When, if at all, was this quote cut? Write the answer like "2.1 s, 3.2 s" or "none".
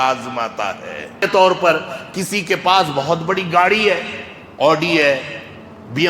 1.2 s